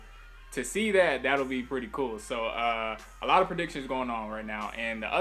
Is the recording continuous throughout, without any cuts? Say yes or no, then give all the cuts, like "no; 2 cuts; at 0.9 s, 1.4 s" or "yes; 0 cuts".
no; 1 cut; at 2.0 s